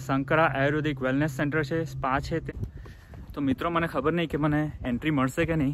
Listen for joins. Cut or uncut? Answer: cut